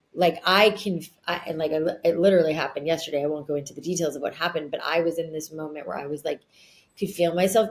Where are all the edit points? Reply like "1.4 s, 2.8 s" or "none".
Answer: none